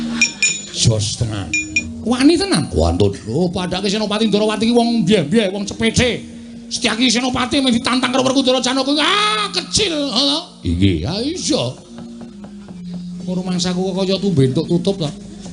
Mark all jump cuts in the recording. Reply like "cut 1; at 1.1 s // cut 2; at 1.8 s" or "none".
cut 1; at 1.8 s